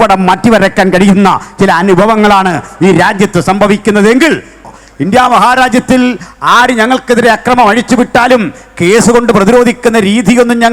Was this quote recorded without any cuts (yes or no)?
no